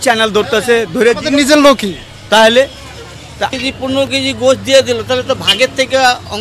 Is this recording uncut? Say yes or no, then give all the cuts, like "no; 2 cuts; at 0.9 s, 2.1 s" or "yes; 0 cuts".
no; 1 cut; at 3.5 s